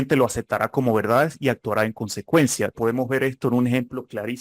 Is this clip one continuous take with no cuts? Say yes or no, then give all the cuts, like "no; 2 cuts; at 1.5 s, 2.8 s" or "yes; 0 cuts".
no; 1 cut; at 2.7 s